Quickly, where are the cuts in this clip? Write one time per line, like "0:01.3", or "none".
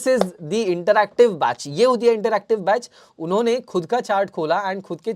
none